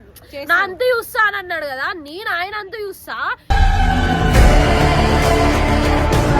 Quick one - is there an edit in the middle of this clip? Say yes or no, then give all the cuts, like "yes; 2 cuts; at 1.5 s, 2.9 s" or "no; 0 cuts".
no; 0 cuts